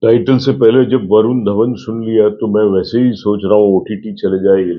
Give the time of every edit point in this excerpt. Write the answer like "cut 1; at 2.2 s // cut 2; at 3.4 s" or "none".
none